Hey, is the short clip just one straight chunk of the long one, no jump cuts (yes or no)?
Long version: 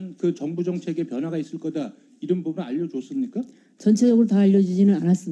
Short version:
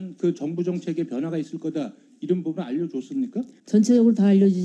no